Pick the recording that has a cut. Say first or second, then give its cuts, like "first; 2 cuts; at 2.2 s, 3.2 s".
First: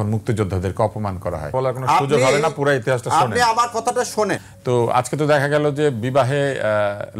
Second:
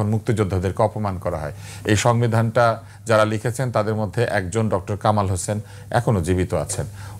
first; 2 cuts; at 1.5 s, 4.5 s